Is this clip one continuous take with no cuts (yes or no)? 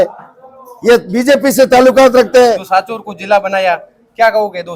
no